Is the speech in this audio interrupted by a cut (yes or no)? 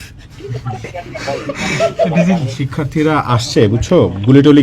yes